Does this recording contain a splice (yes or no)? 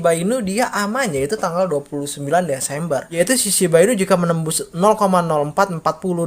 yes